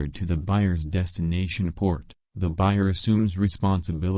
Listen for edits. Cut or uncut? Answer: cut